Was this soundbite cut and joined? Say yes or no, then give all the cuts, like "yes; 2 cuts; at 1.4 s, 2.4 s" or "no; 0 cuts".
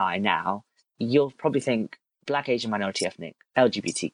yes; 1 cut; at 0.9 s